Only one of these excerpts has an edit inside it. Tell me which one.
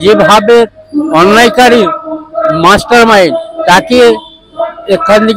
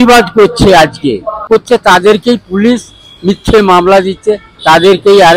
second; 1 cut; at 1.4 s

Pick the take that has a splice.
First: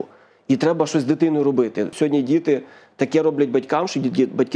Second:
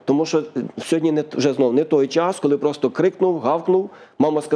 first; 1 cut; at 1.9 s

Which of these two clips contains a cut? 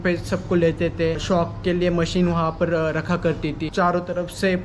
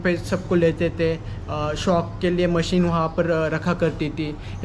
first; 2 cuts; at 1.2 s, 3.7 s

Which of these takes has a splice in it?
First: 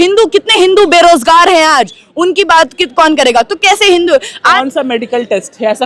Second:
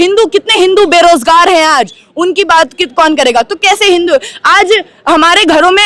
first; 1 cut; at 4.5 s

